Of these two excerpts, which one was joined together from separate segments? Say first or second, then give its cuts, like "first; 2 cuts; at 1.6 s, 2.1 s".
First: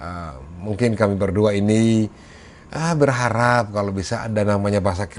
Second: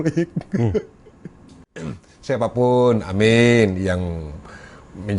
second; 1 cut; at 1.8 s